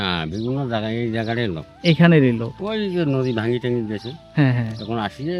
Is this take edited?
no; 0 cuts

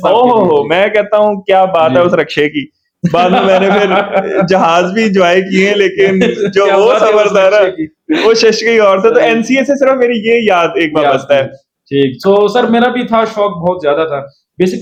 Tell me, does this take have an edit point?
no; 0 cuts

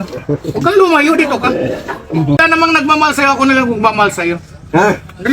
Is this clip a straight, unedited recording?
no; 1 cut; at 2.4 s

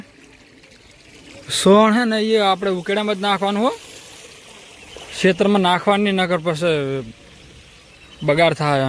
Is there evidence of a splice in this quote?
no; 0 cuts

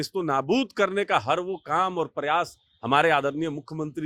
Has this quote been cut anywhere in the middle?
no; 0 cuts

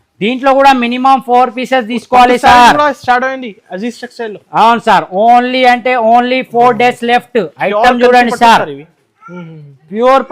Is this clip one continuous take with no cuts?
yes; 0 cuts

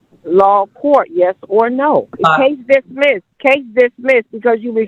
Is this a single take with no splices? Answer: no; 2 cuts; at 2.1 s, 3.3 s

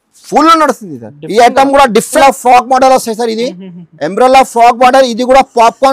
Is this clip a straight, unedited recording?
no; 1 cut; at 2.1 s

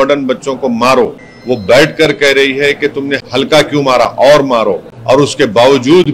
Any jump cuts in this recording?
yes; 3 cuts; at 1.3 s, 3.2 s, 4.9 s

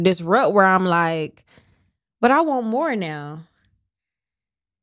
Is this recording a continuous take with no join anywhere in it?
yes; 0 cuts

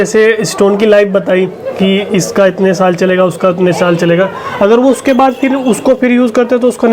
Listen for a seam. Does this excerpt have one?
no; 0 cuts

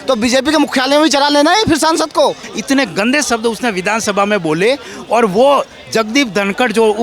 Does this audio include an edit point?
yes; 1 cut; at 2.5 s

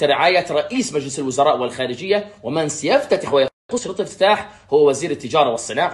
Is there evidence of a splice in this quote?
no; 0 cuts

